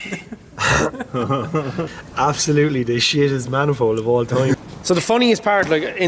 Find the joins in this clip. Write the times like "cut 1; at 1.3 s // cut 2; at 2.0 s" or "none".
cut 1; at 2.0 s // cut 2; at 4.6 s